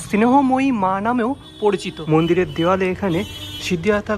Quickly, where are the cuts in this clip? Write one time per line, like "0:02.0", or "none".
0:01.9